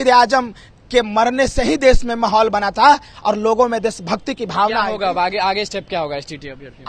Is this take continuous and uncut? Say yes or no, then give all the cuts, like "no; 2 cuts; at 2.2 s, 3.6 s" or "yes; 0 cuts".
yes; 0 cuts